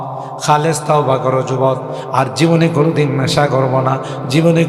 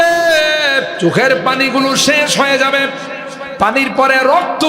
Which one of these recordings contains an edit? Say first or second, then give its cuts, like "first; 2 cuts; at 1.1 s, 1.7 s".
second; 1 cut; at 0.9 s